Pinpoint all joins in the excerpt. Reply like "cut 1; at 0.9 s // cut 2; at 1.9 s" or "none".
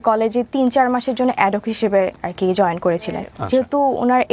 cut 1; at 3.3 s